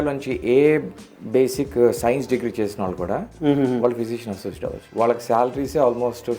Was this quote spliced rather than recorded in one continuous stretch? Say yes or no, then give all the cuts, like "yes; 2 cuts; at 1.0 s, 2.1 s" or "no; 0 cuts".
yes; 2 cuts; at 3.3 s, 4.8 s